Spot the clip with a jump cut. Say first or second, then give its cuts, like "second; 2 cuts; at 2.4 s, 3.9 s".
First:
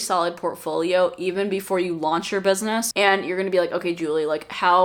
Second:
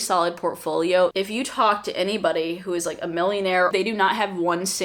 second; 2 cuts; at 1.1 s, 3.7 s